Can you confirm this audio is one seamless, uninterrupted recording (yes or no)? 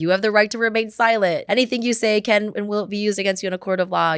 no